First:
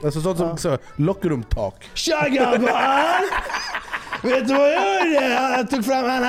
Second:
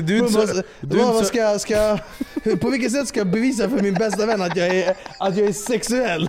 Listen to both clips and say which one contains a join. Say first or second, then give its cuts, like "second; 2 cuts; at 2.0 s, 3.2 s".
first; 1 cut; at 1.9 s